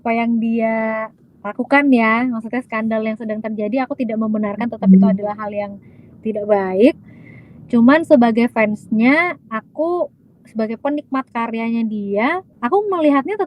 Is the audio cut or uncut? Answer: cut